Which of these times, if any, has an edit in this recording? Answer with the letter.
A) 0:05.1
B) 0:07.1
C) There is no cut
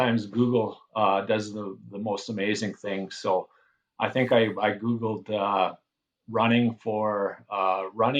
C